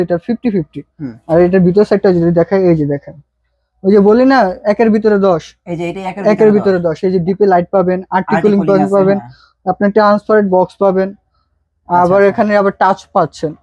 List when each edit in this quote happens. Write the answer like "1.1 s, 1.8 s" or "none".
none

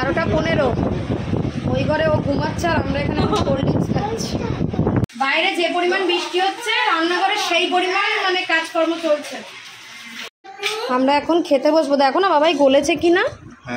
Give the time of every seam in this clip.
5.0 s, 10.2 s

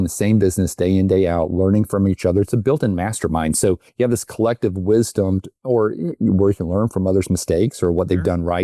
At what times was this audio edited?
3.9 s

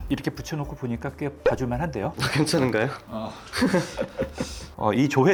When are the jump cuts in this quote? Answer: none

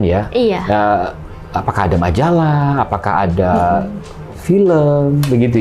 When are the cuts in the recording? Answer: none

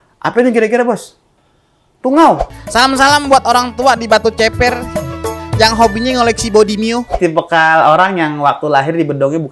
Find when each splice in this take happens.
2.5 s, 7.1 s

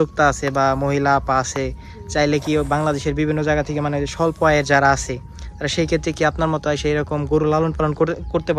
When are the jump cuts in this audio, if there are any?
none

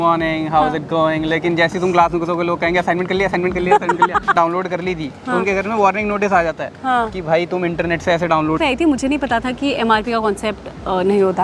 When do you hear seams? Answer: 4.3 s, 8.6 s

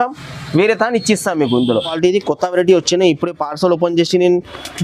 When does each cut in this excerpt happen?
1.9 s

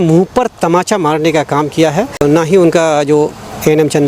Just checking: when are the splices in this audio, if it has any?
2.2 s

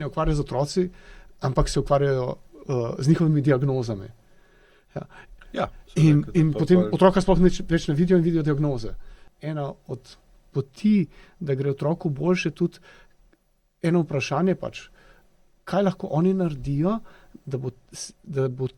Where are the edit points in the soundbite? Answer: 9.3 s

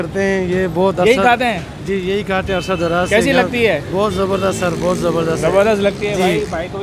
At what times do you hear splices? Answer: none

